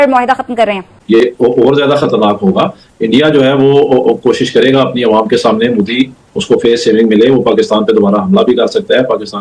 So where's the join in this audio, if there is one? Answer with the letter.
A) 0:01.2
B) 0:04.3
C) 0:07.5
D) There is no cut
A